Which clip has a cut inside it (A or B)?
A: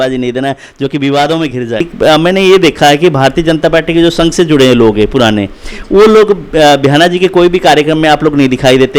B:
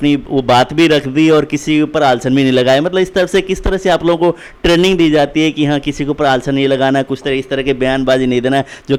A